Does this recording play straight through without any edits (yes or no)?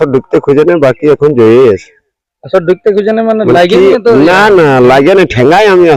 yes